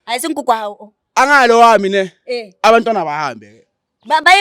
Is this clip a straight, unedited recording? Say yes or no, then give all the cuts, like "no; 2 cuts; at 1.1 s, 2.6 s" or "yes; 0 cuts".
yes; 0 cuts